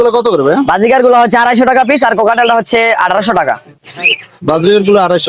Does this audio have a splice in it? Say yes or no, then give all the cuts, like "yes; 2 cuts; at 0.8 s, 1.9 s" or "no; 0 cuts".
no; 0 cuts